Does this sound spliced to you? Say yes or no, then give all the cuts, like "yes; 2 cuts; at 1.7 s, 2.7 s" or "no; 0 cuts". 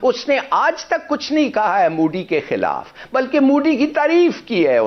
no; 0 cuts